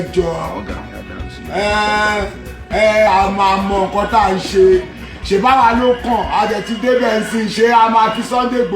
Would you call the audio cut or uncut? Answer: cut